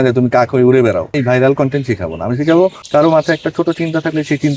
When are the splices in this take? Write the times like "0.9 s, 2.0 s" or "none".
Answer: 1.2 s, 2.8 s